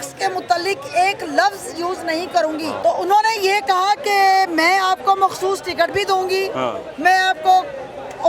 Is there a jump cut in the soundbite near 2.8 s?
yes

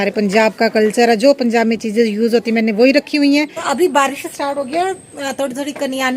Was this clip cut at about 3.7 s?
yes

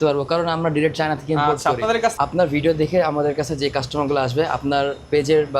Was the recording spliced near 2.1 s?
yes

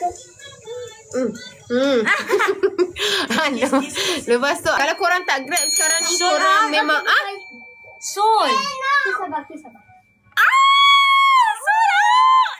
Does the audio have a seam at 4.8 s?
yes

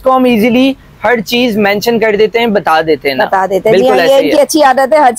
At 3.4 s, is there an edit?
no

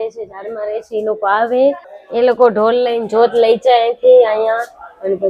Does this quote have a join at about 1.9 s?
yes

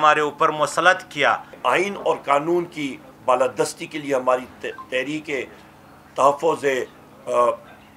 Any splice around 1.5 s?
yes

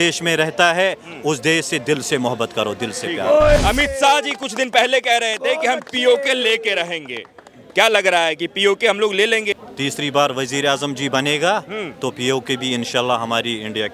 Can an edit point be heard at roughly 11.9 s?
no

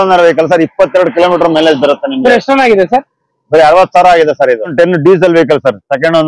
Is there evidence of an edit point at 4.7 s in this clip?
yes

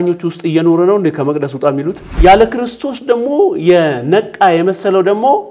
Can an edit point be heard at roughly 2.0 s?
yes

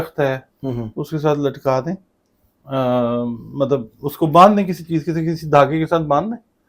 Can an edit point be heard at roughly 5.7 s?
no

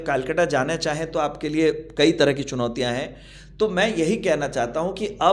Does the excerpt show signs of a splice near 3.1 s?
no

